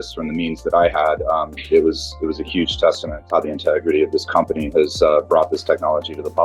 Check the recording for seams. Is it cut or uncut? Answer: cut